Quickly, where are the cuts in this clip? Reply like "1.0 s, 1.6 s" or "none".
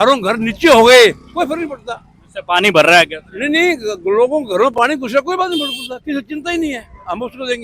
none